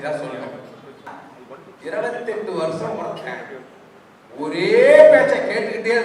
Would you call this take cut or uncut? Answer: cut